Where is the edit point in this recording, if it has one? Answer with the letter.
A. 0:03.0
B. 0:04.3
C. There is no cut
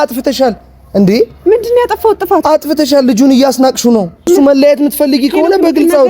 B